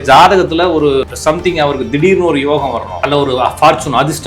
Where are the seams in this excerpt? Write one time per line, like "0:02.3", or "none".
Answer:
0:01.1

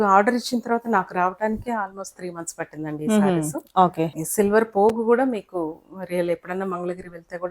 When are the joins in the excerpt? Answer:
0:04.2

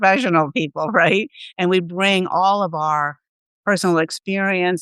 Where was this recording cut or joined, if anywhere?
none

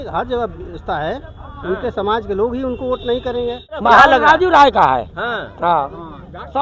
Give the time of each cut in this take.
0:03.8

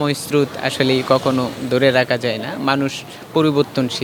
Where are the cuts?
none

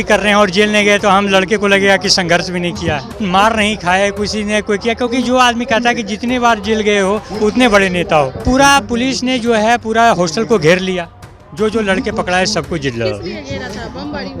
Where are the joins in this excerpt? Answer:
0:03.2
0:08.4

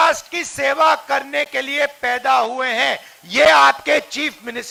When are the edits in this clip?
none

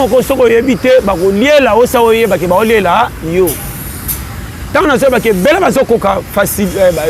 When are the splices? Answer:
none

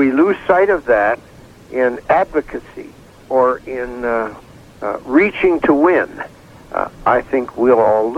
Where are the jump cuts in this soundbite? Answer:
none

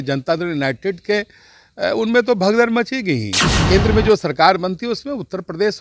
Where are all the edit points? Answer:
0:03.6

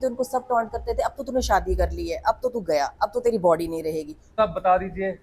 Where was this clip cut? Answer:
0:04.3

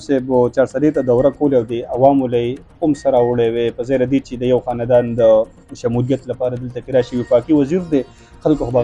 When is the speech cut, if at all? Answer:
none

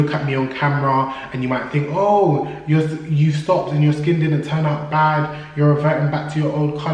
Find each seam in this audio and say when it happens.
none

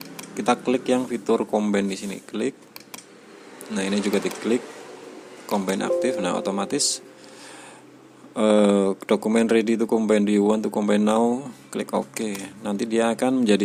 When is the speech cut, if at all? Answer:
none

